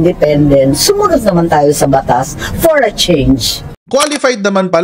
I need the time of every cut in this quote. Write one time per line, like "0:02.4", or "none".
0:03.6